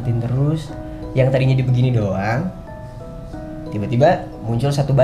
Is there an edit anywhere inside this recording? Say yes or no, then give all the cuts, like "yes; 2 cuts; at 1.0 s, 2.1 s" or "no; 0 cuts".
no; 0 cuts